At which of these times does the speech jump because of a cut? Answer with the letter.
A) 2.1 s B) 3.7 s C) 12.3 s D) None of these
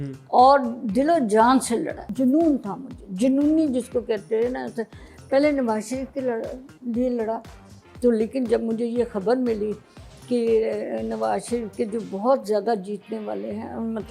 A